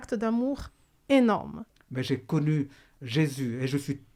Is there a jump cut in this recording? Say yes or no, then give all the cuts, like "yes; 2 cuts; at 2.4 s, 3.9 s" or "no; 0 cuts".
yes; 1 cut; at 1.6 s